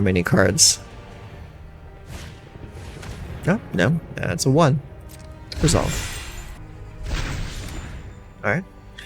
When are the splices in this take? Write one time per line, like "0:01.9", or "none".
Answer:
0:06.6